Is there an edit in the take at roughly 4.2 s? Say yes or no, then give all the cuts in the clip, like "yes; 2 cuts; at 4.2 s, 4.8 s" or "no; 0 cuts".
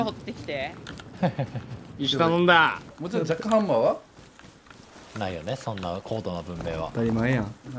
no; 1 cut; at 2.8 s